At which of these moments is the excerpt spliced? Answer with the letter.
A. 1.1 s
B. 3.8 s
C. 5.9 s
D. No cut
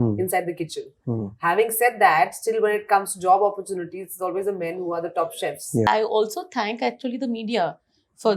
C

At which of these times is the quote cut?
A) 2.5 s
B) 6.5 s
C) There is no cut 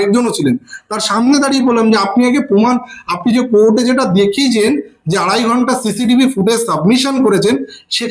C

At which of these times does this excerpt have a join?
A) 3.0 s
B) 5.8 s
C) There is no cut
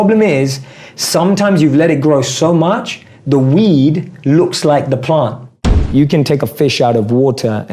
B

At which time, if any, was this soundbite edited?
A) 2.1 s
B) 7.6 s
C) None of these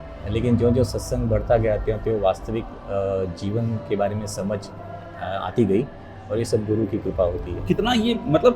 C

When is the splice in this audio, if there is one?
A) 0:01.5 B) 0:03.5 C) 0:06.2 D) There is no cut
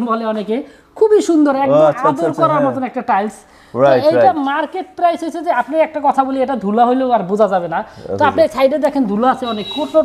D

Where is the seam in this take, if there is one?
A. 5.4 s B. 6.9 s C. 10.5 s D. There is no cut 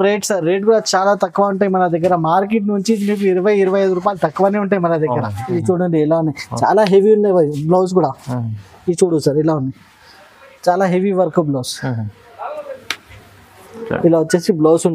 A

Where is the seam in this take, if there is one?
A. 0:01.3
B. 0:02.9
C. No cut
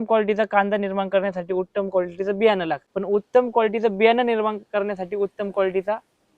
B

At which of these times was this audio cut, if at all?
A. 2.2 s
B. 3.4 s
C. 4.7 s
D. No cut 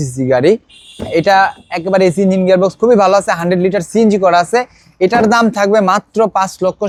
D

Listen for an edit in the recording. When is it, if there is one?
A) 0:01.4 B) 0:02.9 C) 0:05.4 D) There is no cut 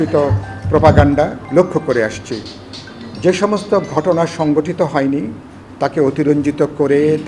A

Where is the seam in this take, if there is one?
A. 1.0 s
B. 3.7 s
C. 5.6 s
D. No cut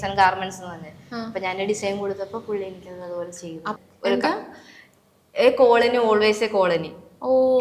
B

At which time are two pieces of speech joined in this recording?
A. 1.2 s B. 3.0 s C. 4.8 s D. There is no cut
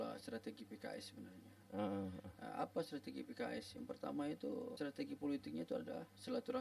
C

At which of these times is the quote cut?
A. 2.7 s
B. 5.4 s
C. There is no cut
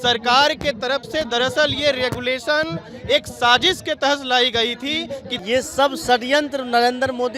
B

